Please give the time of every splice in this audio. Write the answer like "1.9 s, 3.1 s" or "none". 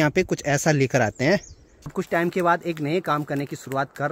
2.0 s